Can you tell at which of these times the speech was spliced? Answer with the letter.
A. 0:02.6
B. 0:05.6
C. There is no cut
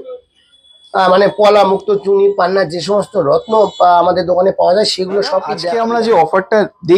B